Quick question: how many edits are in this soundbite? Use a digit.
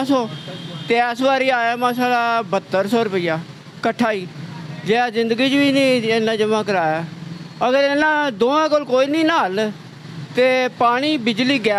0